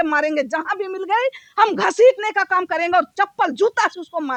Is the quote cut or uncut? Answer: uncut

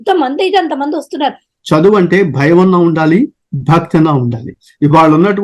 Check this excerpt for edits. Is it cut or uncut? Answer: cut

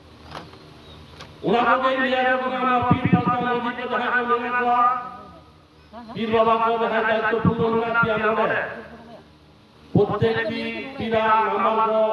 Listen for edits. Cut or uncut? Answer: uncut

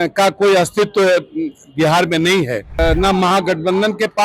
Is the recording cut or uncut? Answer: cut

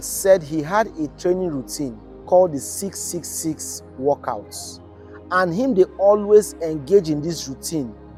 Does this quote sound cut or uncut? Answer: uncut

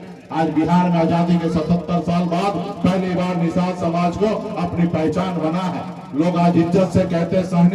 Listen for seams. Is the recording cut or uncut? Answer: uncut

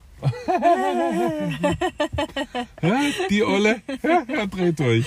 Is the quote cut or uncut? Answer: uncut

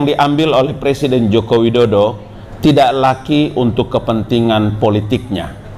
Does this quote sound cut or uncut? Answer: uncut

